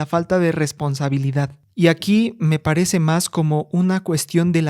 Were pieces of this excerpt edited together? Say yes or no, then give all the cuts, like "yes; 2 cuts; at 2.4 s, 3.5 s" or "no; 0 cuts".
yes; 1 cut; at 1.6 s